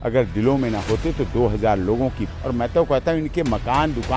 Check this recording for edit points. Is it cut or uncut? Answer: cut